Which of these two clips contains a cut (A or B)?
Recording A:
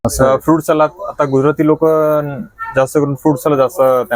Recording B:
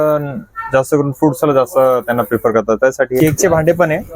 B